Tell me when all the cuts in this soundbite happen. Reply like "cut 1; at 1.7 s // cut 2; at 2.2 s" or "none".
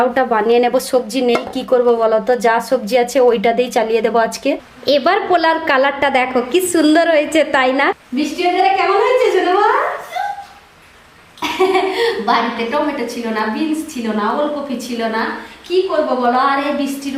cut 1; at 4.9 s // cut 2; at 7.9 s